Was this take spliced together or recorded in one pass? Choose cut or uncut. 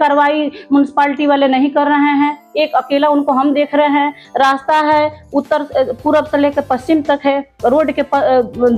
uncut